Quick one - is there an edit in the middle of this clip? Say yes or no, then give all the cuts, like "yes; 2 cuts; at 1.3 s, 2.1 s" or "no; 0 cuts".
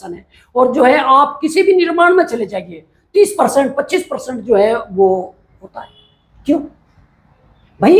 no; 0 cuts